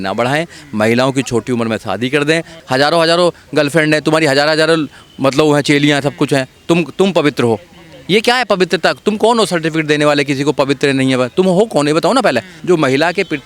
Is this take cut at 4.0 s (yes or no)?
no